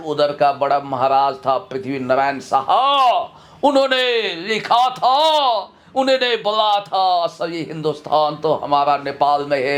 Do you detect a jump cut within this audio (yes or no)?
no